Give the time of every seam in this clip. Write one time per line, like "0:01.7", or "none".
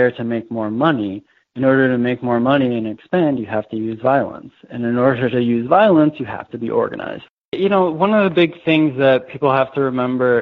0:07.6